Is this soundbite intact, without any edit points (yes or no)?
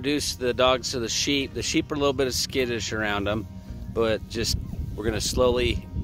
yes